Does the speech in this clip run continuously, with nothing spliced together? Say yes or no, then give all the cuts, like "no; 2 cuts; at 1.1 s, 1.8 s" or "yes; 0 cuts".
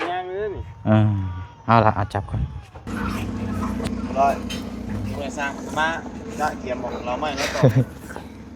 no; 1 cut; at 2.9 s